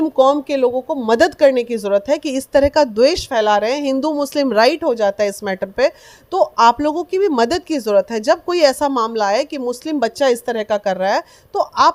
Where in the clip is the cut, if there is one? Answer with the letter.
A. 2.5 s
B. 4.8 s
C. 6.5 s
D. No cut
D